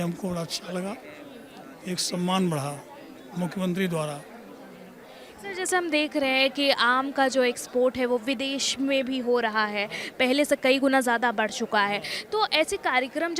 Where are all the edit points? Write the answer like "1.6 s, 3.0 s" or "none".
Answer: none